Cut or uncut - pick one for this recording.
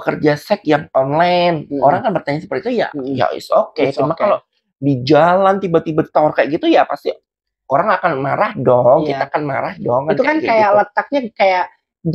uncut